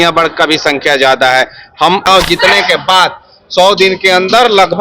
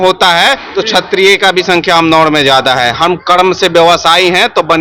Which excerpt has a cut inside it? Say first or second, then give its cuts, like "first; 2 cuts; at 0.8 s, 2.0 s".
first; 1 cut; at 2.1 s